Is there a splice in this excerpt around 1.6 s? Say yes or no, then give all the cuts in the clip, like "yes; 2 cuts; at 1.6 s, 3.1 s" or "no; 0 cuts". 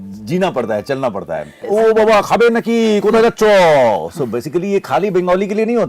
yes; 1 cut; at 1.6 s